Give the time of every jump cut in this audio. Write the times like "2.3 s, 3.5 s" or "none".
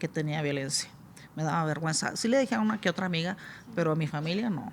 none

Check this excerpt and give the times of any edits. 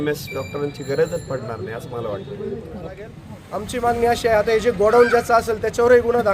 3.0 s

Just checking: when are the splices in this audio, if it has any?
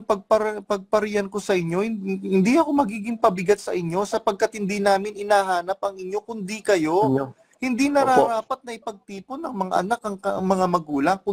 none

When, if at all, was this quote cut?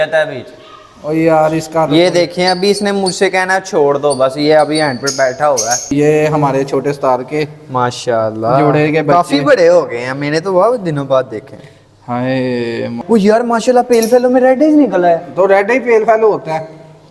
5.9 s, 13.0 s

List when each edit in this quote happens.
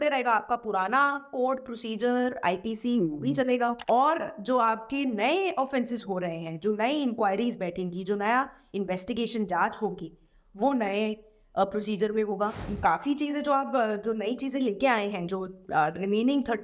3.8 s, 12.6 s

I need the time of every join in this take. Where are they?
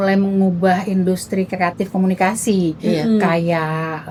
none

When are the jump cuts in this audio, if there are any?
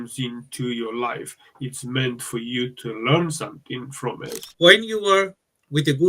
4.4 s

